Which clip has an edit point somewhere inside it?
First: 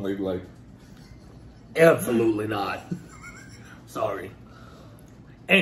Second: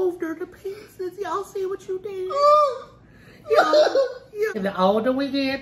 second; 1 cut; at 4.6 s

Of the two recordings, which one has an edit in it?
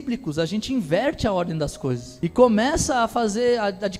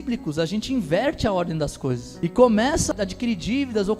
second; 1 cut; at 2.9 s

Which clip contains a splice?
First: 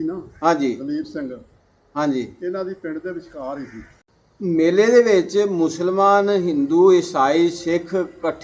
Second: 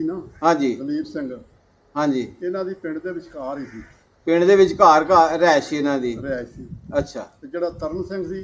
first; 1 cut; at 4.0 s

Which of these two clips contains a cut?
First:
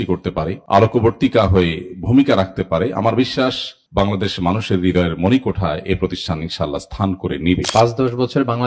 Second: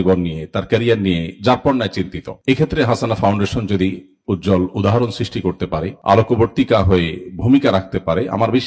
first; 1 cut; at 7.7 s

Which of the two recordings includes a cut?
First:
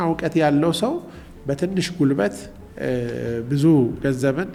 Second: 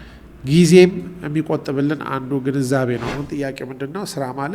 second; 1 cut; at 3.1 s

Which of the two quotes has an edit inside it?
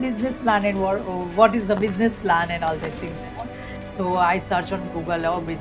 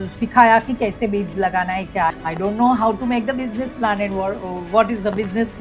second; 1 cut; at 2.1 s

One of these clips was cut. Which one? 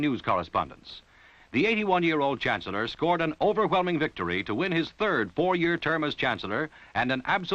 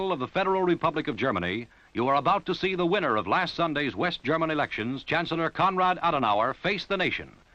first; 1 cut; at 2.9 s

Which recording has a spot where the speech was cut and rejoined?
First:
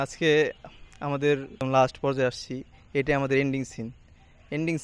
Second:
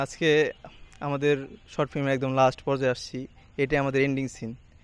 first; 1 cut; at 1.6 s

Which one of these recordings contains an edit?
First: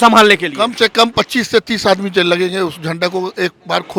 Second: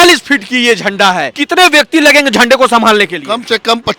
second; 1 cut; at 1.3 s

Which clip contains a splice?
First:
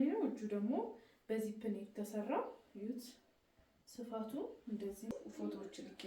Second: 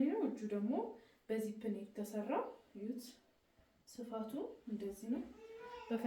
first; 1 cut; at 5.1 s

